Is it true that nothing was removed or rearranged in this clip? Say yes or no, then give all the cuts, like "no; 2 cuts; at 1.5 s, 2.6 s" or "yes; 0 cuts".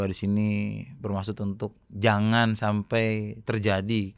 yes; 0 cuts